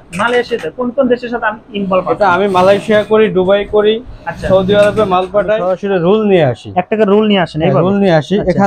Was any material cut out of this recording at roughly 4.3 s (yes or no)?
no